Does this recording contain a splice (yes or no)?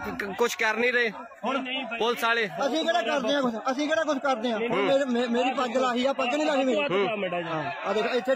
no